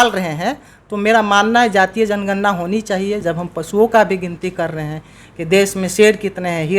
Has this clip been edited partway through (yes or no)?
no